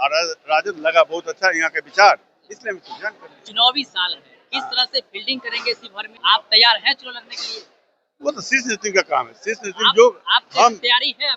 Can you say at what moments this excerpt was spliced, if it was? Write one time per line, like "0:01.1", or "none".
0:06.1